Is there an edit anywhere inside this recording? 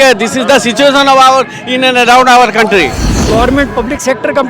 yes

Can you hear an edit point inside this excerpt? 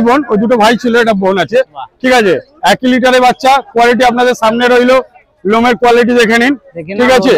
no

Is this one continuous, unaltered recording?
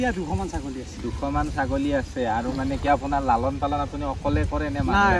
yes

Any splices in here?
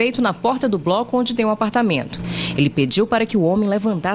no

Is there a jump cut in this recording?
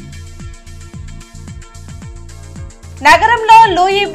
yes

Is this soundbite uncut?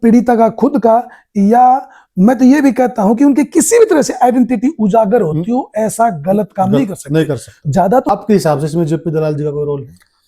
no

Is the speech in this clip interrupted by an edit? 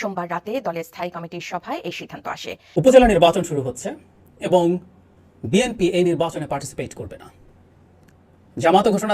yes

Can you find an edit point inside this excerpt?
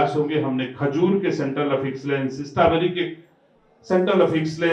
no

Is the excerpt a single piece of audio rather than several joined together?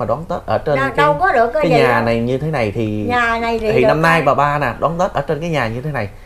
yes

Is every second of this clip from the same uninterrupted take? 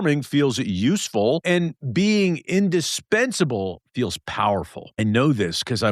no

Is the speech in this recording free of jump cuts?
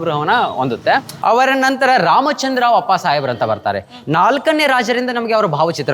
no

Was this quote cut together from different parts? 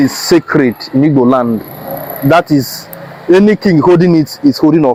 no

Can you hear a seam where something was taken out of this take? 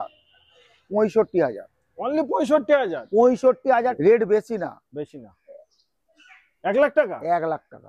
yes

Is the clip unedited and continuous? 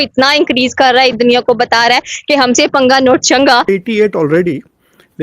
no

